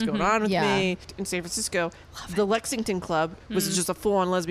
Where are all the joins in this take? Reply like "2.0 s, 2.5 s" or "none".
1.1 s, 3.4 s